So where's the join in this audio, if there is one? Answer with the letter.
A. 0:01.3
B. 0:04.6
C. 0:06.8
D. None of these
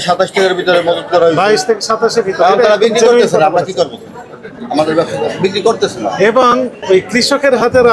D